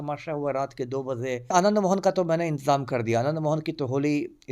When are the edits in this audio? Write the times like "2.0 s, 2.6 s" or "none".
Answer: 1.5 s